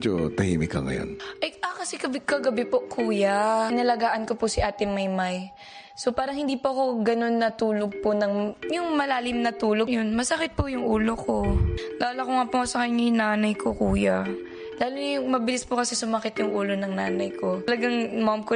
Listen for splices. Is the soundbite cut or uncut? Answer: uncut